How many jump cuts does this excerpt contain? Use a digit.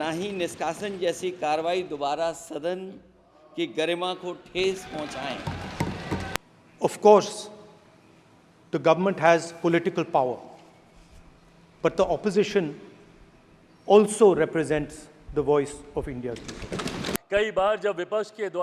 2